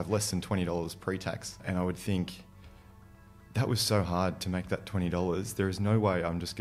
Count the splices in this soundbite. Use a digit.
1